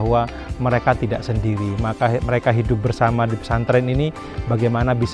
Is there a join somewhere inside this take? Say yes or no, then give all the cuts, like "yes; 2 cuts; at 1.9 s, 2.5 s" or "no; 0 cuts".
no; 0 cuts